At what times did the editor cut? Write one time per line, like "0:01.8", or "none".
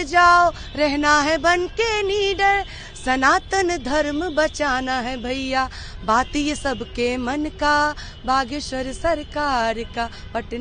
none